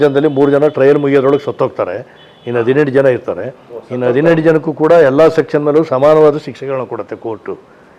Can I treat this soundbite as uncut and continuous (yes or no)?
yes